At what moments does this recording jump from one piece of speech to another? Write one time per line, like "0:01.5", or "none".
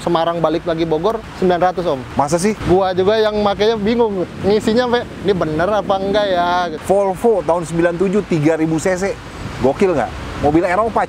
0:01.3
0:02.2
0:04.3
0:06.8